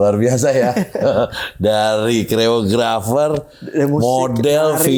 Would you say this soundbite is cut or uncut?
uncut